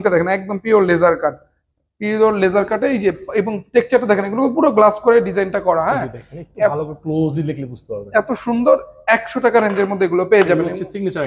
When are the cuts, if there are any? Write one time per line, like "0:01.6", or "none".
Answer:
none

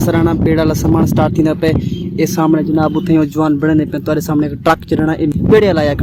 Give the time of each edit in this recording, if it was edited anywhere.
none

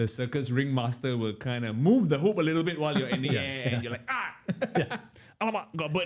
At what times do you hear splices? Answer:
none

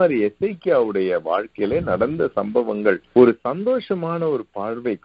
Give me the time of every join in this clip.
0:03.0

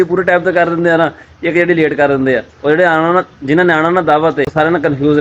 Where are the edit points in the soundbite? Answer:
none

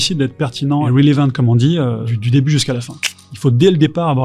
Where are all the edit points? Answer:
0:00.9
0:02.1
0:03.1

